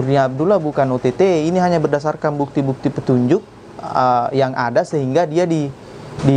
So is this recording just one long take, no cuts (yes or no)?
yes